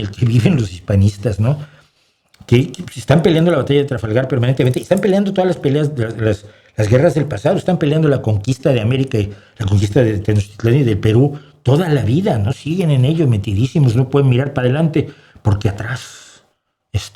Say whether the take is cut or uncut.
uncut